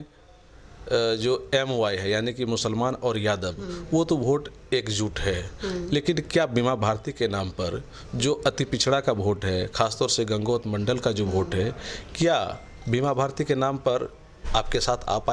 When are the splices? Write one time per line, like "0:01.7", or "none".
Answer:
none